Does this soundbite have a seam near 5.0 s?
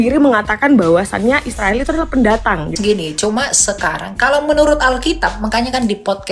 no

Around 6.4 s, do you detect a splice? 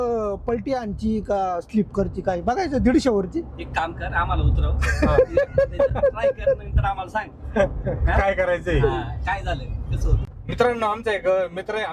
no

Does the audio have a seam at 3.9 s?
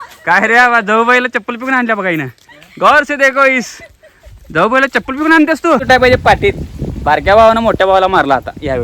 no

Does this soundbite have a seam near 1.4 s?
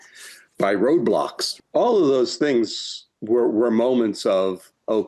yes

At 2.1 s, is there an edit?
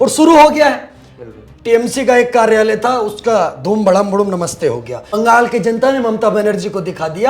no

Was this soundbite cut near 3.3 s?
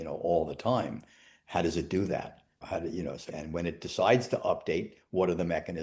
yes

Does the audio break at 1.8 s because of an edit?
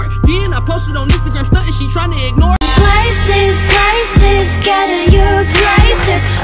no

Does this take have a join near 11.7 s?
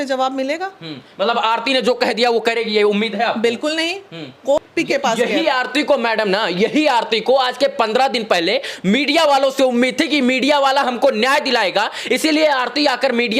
no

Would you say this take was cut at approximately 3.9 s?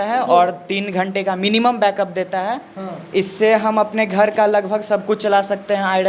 no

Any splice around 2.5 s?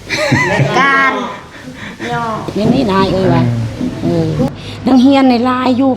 yes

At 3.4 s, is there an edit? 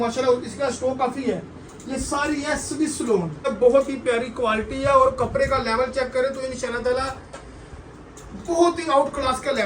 yes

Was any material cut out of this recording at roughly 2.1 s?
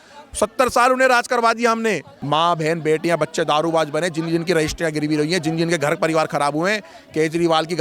yes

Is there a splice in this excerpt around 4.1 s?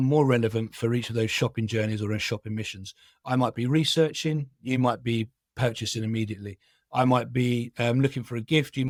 no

